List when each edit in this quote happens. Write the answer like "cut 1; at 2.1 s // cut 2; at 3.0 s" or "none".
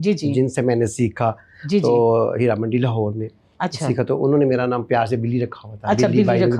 none